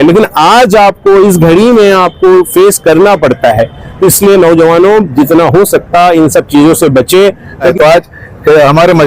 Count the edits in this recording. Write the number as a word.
one